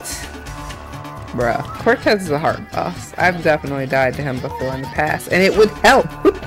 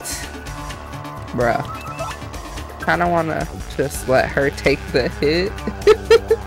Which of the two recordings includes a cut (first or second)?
first